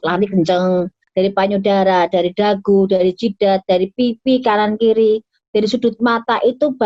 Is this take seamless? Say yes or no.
no